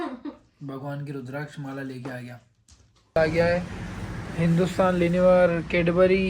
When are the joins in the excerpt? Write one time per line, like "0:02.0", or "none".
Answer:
0:03.2